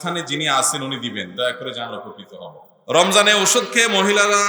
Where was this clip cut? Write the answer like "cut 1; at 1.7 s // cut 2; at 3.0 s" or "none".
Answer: cut 1; at 2.6 s